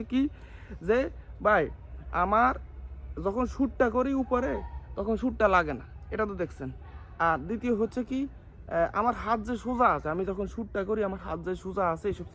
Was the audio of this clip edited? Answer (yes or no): no